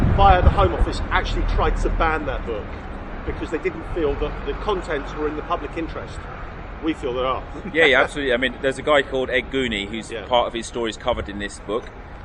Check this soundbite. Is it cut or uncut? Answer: uncut